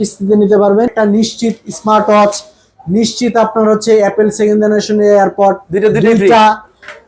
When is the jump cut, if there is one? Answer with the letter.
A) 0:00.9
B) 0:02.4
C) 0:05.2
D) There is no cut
A